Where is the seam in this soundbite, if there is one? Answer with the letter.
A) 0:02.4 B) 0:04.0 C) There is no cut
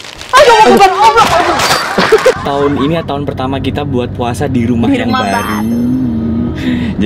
A